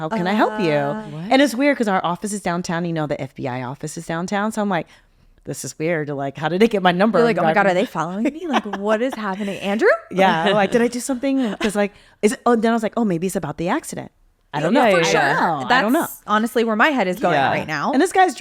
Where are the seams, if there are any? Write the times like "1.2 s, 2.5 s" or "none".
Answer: none